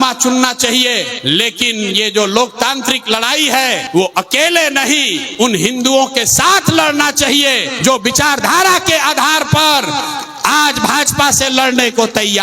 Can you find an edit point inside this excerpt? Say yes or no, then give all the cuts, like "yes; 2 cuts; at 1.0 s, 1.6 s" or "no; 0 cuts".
yes; 4 cuts; at 1.1 s, 3.8 s, 5.2 s, 7.7 s